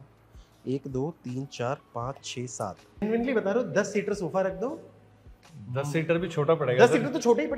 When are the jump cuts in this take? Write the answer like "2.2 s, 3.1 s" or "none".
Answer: 3.0 s